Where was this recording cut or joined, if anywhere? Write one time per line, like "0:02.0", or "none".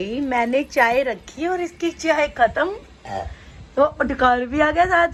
none